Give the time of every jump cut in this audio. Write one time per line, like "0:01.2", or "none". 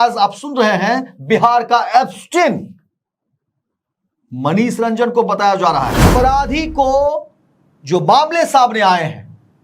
0:06.1